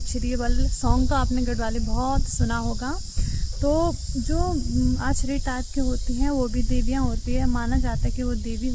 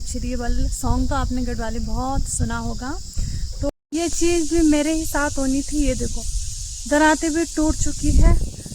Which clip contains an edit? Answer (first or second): second